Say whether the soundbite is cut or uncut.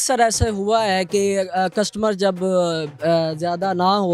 uncut